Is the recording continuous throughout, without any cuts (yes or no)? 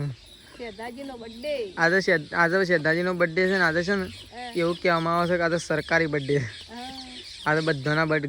yes